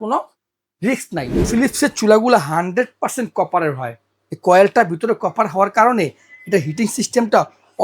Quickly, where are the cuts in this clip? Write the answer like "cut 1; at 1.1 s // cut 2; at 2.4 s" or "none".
cut 1; at 1.4 s